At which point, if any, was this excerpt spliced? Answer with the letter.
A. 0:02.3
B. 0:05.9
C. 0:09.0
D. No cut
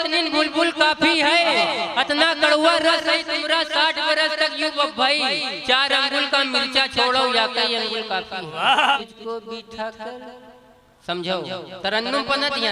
C